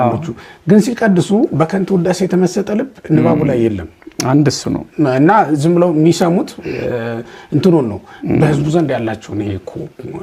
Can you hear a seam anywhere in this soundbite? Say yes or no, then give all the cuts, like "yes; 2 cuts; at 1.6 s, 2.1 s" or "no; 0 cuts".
no; 0 cuts